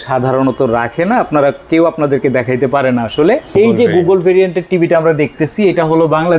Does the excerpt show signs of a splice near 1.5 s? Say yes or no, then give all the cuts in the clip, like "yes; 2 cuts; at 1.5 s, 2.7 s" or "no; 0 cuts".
no; 1 cut; at 3.5 s